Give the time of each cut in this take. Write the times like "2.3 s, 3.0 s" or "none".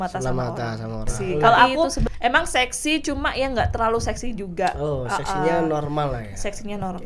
1.2 s